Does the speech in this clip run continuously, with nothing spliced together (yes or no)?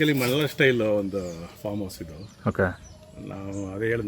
yes